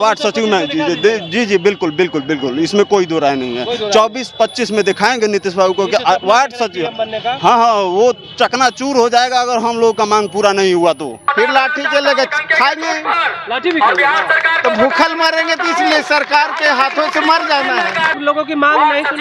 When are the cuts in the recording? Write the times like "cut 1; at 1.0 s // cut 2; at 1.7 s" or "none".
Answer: cut 1; at 11.3 s // cut 2; at 18.2 s

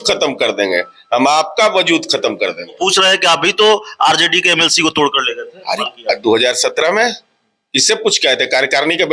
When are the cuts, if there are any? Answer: cut 1; at 2.7 s // cut 2; at 5.8 s

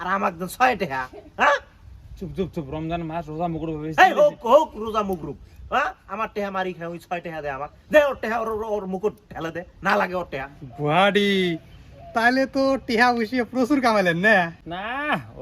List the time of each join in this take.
cut 1; at 10.6 s

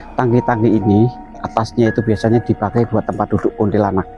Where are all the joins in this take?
none

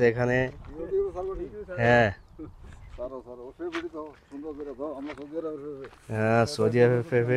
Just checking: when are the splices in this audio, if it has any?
none

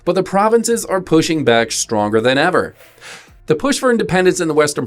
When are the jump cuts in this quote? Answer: cut 1; at 2.8 s

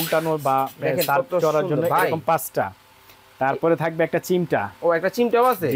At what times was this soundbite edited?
none

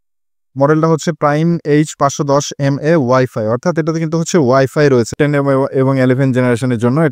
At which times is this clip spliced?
cut 1; at 5.1 s

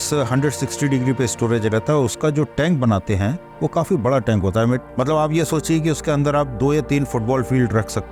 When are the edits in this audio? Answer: none

